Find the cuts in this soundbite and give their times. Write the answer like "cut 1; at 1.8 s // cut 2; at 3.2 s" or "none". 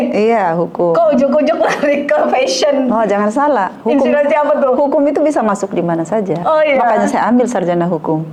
none